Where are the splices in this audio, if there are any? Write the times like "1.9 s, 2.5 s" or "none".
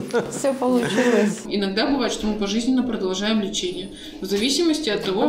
1.4 s